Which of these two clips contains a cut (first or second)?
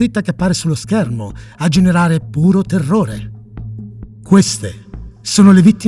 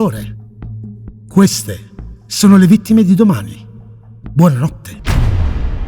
second